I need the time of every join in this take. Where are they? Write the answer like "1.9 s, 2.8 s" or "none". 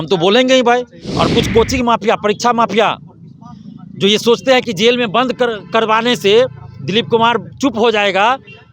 1.0 s